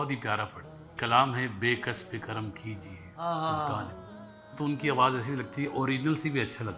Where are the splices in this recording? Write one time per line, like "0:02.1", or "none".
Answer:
0:01.0
0:04.4